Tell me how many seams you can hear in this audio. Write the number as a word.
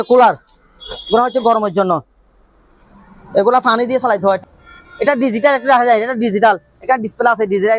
one